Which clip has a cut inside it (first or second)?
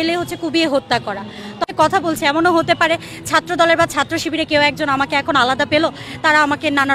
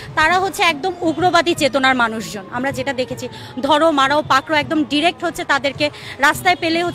first